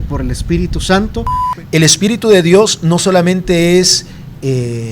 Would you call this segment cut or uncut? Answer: cut